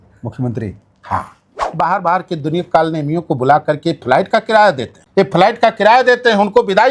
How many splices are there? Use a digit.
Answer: 2